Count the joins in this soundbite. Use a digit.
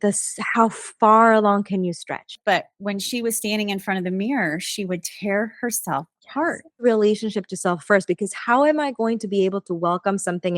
2